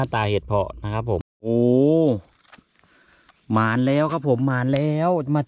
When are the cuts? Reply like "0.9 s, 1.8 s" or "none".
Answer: 1.3 s